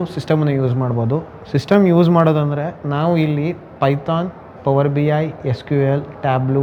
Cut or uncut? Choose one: uncut